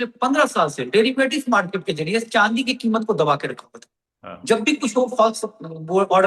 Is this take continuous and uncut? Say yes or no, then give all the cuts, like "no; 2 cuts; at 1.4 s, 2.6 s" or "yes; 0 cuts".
yes; 0 cuts